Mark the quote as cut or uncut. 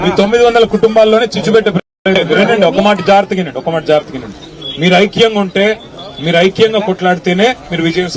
cut